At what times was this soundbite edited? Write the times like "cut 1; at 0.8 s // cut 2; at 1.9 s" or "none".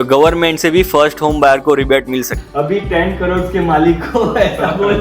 cut 1; at 2.4 s